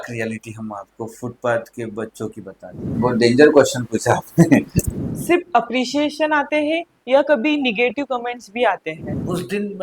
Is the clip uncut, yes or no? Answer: no